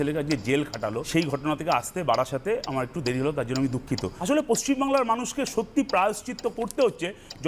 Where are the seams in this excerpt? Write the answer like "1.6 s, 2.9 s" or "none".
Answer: 1.0 s, 4.1 s